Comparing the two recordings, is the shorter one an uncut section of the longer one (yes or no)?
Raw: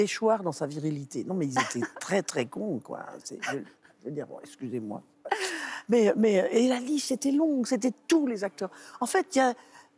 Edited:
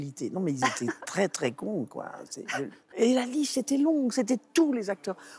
no